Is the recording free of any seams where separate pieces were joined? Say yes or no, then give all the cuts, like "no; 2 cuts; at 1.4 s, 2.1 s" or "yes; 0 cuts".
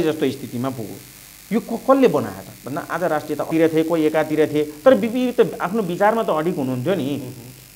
no; 1 cut; at 3.5 s